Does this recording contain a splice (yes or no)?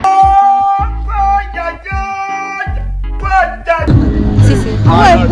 no